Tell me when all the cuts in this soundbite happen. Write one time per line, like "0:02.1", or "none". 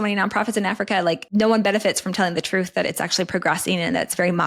0:01.2